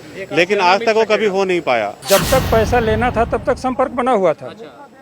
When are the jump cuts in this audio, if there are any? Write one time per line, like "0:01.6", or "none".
0:01.9